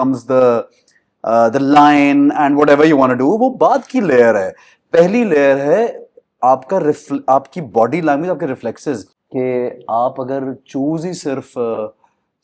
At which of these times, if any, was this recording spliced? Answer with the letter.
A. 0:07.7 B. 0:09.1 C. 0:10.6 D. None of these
B